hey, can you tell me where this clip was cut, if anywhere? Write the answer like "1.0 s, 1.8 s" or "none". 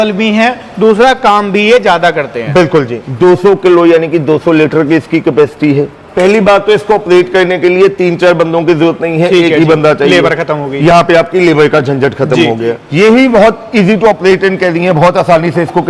3.0 s, 6.0 s, 12.8 s